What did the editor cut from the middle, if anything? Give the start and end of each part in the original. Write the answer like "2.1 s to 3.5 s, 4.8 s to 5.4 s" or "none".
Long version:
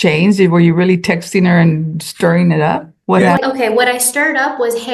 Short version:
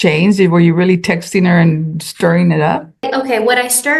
3.1 s to 3.4 s